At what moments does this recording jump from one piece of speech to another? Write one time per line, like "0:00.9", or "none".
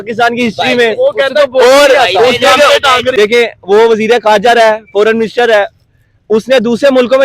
0:03.1